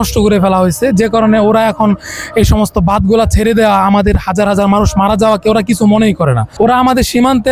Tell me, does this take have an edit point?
yes; 1 cut; at 6.4 s

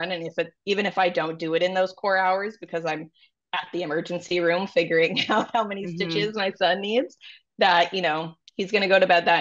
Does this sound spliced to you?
no; 0 cuts

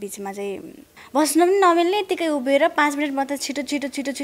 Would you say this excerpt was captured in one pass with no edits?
no; 1 cut; at 0.9 s

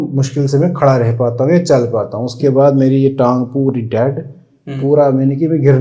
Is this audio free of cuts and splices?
yes; 0 cuts

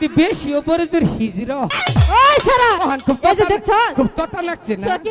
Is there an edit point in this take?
yes; 2 cuts; at 1.8 s, 2.8 s

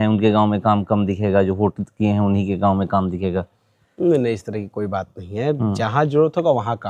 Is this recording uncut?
yes; 0 cuts

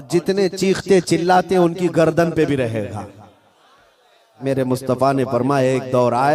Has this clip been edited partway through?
yes; 1 cut; at 4.4 s

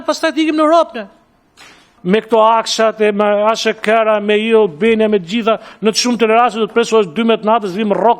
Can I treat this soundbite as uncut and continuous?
no; 1 cut; at 1.9 s

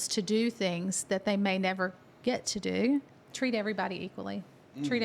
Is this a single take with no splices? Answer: no; 1 cut; at 3.2 s

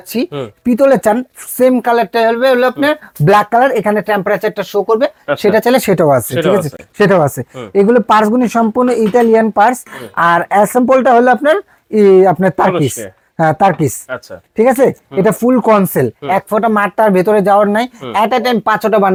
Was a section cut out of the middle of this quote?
no; 0 cuts

